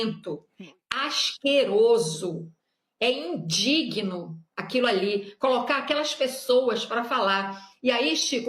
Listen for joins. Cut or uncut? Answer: uncut